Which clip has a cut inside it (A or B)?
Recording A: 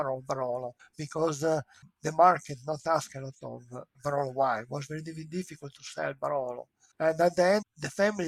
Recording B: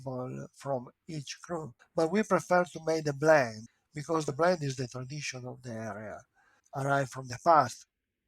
B